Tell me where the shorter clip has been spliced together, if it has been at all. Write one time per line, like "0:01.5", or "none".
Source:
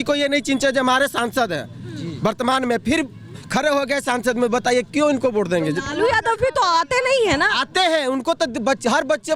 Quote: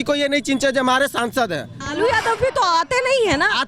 0:01.9